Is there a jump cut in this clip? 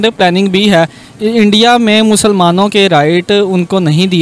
no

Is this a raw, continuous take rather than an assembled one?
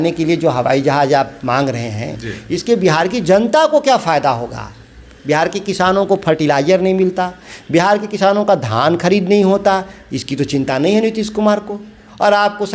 yes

